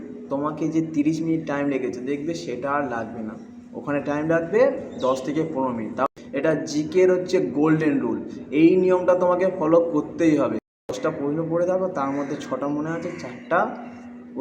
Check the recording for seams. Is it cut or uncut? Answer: cut